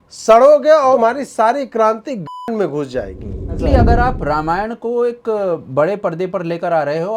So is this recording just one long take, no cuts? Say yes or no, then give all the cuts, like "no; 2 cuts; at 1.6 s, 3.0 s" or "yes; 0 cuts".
no; 2 cuts; at 0.9 s, 3.6 s